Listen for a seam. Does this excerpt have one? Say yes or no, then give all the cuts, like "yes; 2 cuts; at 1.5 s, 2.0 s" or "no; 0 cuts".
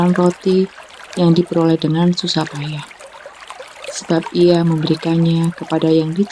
no; 0 cuts